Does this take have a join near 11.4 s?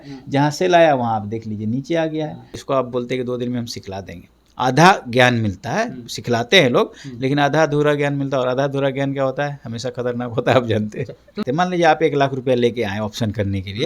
yes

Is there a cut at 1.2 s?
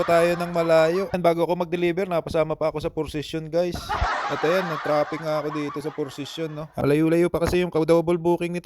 yes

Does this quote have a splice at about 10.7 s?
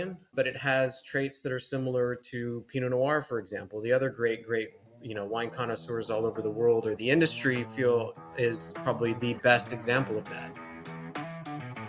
yes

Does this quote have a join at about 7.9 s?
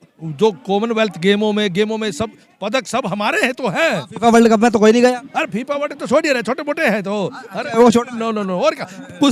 no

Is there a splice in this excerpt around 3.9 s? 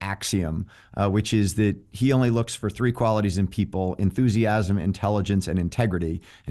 no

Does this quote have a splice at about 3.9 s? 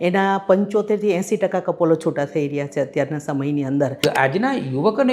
yes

